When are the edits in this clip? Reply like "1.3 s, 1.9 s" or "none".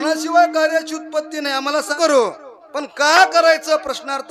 1.9 s